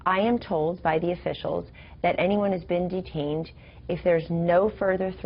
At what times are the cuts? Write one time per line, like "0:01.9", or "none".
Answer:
0:01.1